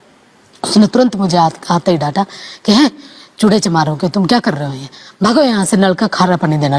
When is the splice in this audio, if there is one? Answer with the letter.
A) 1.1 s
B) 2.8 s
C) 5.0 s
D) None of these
D